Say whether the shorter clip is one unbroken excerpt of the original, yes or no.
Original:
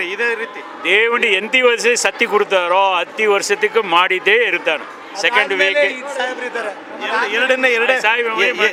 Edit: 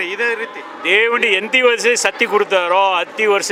yes